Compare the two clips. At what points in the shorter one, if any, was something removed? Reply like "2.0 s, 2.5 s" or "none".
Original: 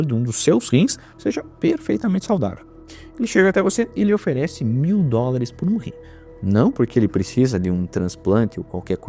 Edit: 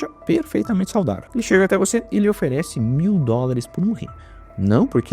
1.2 s